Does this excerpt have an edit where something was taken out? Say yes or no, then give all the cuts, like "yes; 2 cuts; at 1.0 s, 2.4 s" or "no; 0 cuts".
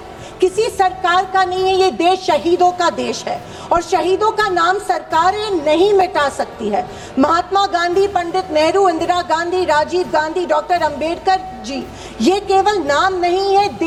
no; 0 cuts